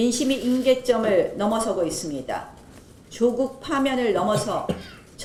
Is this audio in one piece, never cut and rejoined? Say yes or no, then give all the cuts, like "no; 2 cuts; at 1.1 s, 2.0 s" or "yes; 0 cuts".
yes; 0 cuts